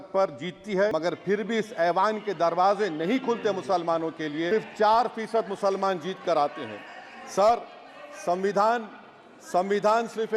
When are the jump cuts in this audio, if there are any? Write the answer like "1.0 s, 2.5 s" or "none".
0.9 s, 4.5 s